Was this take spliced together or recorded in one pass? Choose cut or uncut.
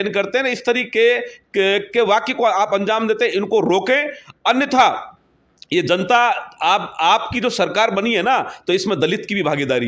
uncut